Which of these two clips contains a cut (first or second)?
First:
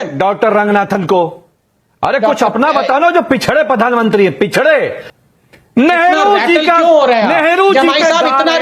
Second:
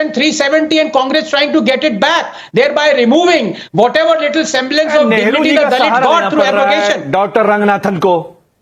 first